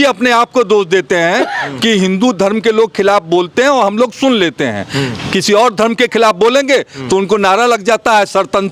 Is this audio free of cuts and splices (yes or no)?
yes